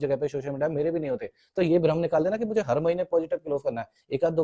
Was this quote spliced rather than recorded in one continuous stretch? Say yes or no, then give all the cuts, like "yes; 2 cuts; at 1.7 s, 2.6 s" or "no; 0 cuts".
no; 0 cuts